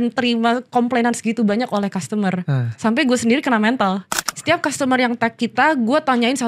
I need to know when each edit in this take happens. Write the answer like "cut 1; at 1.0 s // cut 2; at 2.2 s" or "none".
cut 1; at 4.2 s